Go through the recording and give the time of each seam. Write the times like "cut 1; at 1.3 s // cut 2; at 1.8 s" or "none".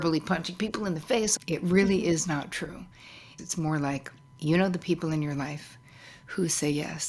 cut 1; at 1.3 s // cut 2; at 3.3 s